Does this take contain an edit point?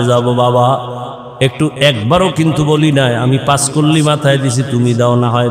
no; 0 cuts

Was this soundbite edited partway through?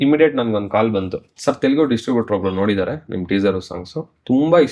yes; 1 cut; at 1.3 s

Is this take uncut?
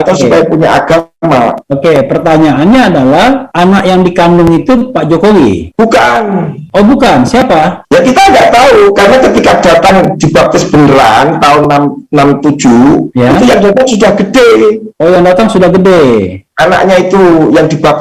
yes; 0 cuts

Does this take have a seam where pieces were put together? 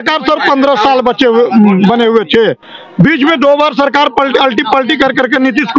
no; 0 cuts

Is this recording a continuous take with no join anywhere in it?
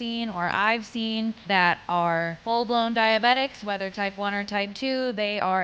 no; 2 cuts; at 1.4 s, 2.4 s

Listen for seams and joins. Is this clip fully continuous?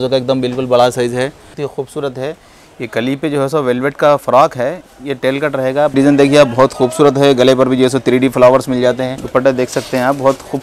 no; 3 cuts; at 1.5 s, 5.9 s, 9.1 s

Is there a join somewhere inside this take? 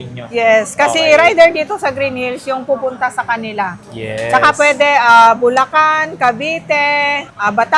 no; 0 cuts

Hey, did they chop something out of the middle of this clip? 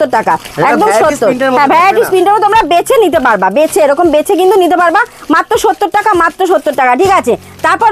no; 0 cuts

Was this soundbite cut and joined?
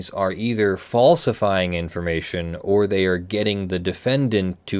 no; 0 cuts

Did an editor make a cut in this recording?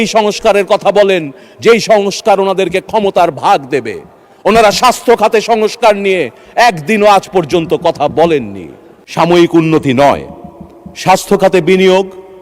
yes; 1 cut; at 9.0 s

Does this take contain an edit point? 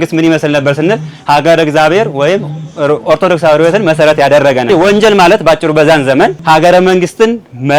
yes; 2 cuts; at 4.7 s, 6.4 s

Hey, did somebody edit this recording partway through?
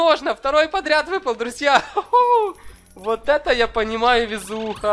no; 0 cuts

